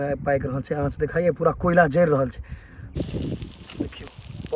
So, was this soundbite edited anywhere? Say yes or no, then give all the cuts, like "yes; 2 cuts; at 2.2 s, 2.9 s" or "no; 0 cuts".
yes; 1 cut; at 2.9 s